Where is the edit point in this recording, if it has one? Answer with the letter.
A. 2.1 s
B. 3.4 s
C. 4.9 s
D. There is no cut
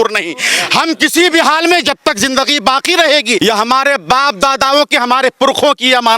B